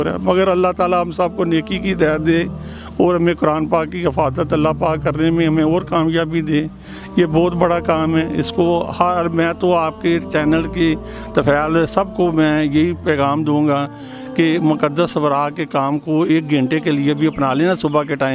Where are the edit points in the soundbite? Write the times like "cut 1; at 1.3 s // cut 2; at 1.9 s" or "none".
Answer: none